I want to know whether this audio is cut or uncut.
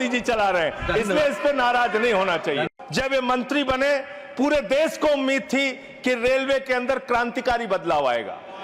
cut